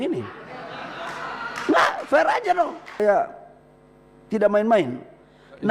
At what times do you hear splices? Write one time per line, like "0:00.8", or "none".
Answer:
0:03.0